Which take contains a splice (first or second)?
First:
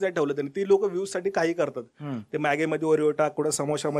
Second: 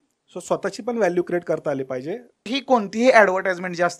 second